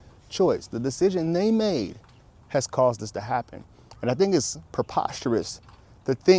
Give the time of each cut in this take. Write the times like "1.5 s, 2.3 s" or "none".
none